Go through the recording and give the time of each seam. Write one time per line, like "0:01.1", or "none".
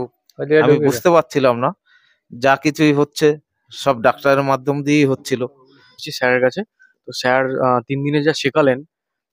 0:05.9